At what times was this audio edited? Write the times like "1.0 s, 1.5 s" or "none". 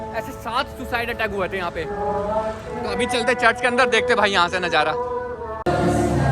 none